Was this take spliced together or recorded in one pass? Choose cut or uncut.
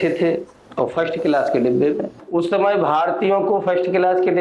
cut